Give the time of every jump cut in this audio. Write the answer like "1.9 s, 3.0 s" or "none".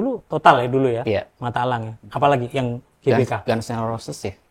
none